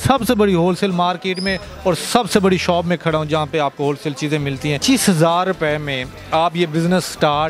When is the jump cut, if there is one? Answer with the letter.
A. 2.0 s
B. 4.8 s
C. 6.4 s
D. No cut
B